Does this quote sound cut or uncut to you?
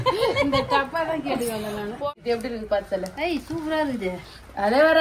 cut